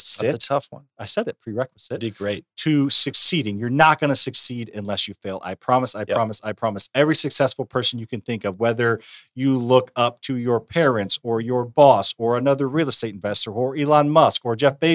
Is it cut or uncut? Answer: uncut